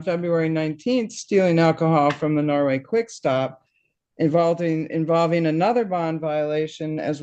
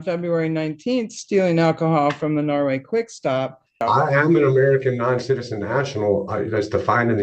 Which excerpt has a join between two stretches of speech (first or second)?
second